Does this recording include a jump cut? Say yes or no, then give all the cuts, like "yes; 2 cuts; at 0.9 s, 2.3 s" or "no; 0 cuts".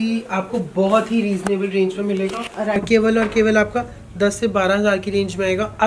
yes; 1 cut; at 2.8 s